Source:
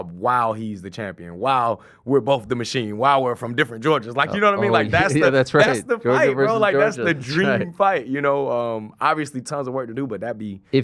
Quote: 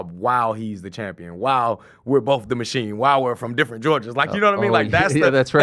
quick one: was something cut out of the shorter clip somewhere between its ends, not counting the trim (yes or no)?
no